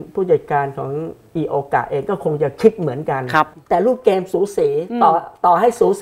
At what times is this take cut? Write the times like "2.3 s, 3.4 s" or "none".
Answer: 3.6 s